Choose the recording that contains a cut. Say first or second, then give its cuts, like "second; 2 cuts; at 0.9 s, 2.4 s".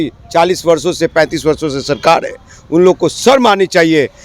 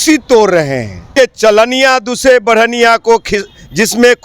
second; 1 cut; at 1.1 s